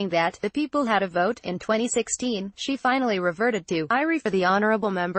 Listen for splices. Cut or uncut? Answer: uncut